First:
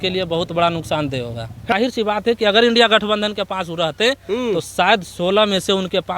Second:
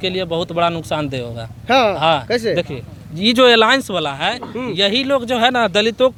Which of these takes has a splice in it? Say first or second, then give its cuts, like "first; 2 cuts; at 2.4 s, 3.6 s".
first; 1 cut; at 1.7 s